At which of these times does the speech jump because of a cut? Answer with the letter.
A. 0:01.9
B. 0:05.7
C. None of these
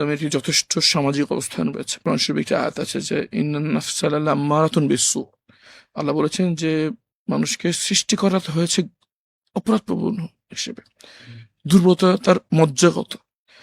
A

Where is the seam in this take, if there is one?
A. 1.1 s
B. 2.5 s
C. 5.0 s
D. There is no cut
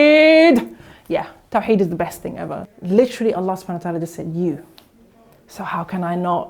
B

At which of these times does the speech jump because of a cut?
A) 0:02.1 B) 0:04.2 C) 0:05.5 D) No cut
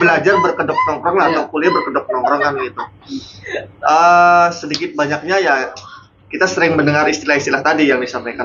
D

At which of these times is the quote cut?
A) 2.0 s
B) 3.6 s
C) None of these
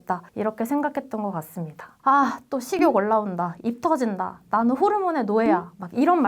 A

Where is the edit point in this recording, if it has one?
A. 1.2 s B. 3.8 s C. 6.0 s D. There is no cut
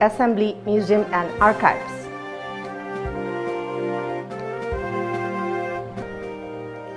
C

